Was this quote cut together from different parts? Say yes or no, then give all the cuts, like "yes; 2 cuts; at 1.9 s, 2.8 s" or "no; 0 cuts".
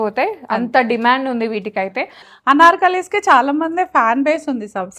yes; 1 cut; at 2.3 s